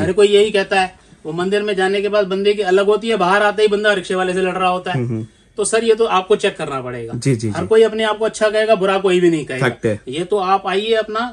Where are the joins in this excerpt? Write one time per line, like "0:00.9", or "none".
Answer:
none